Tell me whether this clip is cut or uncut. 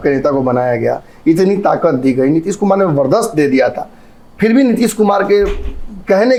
uncut